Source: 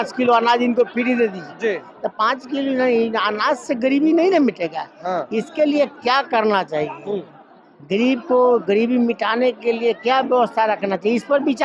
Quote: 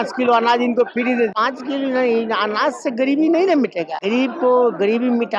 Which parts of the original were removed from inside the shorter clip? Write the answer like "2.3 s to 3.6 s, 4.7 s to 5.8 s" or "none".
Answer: 1.4 s to 2.2 s, 4.8 s to 7.8 s